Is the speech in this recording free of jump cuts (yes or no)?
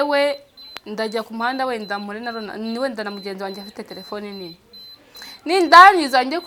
yes